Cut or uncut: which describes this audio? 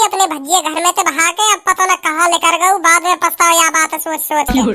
uncut